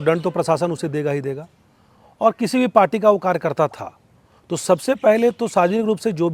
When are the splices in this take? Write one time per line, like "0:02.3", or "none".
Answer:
none